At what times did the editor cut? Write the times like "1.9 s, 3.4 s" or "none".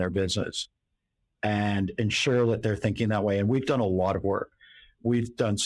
none